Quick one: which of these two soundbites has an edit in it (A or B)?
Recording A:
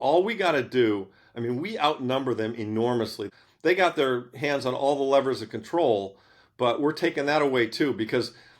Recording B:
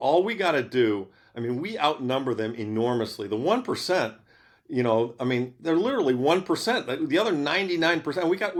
A